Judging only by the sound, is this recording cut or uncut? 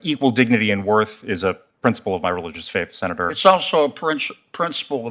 uncut